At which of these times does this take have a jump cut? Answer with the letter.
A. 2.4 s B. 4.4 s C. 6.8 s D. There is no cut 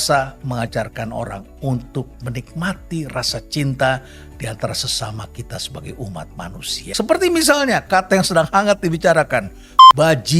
C